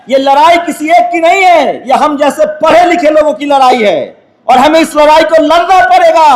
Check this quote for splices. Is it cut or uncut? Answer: uncut